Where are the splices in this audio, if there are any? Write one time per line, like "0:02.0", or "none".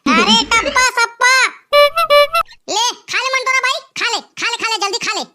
0:02.4